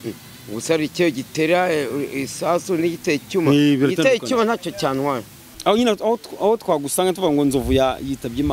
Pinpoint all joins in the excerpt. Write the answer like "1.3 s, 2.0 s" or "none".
5.4 s